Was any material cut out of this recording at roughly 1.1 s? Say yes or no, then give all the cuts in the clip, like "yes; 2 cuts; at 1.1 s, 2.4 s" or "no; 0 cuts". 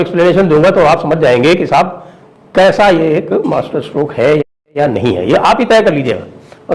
no; 1 cut; at 4.6 s